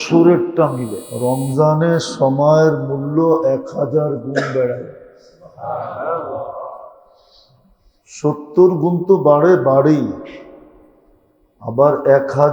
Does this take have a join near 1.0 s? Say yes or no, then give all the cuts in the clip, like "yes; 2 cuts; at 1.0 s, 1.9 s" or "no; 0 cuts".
yes; 1 cut; at 1.0 s